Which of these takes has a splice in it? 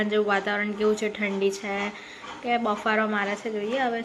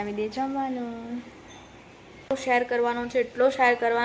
second; 1 cut; at 2.3 s

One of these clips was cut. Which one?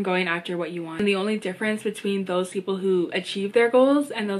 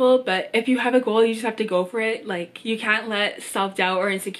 first; 1 cut; at 1.0 s

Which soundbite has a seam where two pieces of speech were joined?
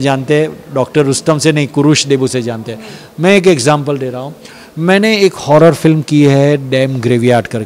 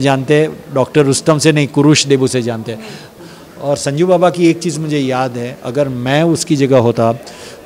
second; 1 cut; at 3.0 s

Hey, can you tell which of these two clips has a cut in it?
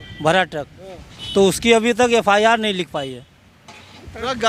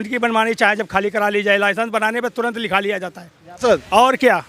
second; 1 cut; at 3.4 s

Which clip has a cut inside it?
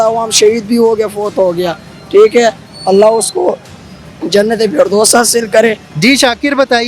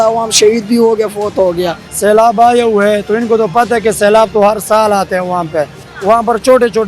second; 2 cuts; at 1.8 s, 5.8 s

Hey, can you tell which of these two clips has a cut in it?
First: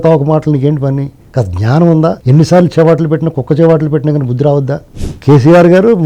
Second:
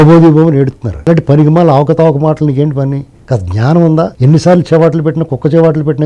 first; 1 cut; at 5.1 s

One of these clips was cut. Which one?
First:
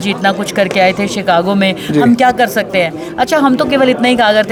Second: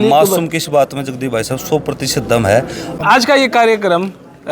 second; 1 cut; at 3.0 s

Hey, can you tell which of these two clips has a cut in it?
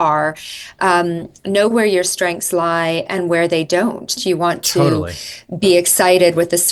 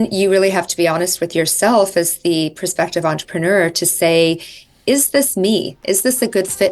first; 1 cut; at 4.2 s

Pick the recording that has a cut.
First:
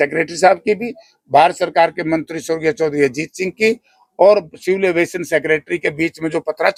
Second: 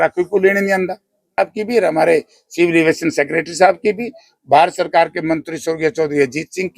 second; 1 cut; at 1.4 s

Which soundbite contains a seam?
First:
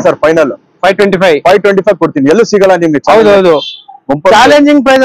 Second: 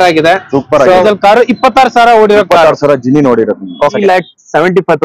second; 2 cuts; at 1.0 s, 3.9 s

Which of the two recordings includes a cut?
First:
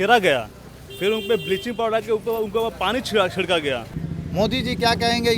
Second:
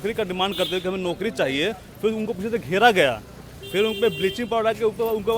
first; 1 cut; at 4.0 s

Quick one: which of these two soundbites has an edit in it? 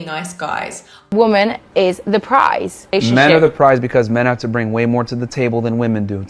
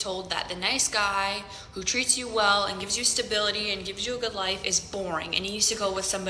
first; 1 cut; at 0.9 s

